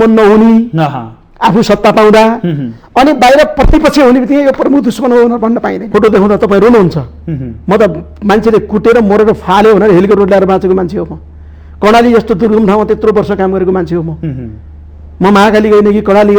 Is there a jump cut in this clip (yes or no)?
yes